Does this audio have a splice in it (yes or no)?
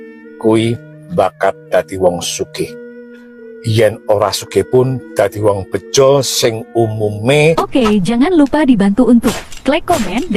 yes